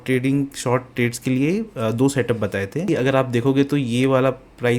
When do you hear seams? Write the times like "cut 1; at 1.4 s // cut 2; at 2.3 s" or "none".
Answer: cut 1; at 2.9 s

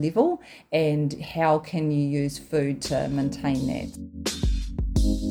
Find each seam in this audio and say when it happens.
cut 1; at 3.9 s

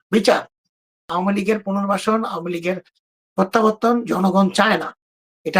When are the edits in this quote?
cut 1; at 1.1 s

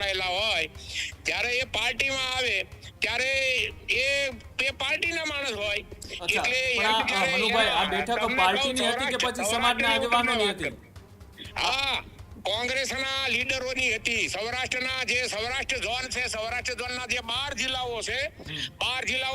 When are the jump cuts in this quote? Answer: none

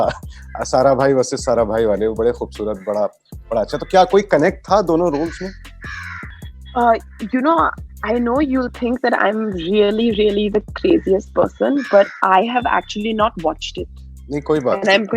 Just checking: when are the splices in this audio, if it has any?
none

